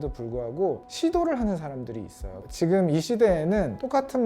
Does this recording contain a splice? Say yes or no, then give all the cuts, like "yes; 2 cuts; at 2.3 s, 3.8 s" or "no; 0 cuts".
yes; 1 cut; at 2.3 s